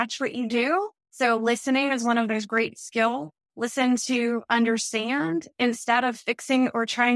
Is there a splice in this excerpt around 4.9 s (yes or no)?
no